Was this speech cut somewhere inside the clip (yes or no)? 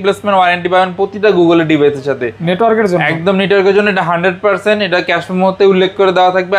no